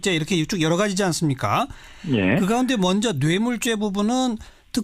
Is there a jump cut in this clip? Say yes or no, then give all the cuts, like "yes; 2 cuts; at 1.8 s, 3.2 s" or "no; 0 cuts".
yes; 1 cut; at 2.5 s